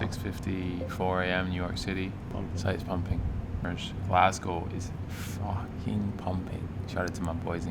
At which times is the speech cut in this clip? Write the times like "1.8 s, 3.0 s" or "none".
2.3 s, 3.6 s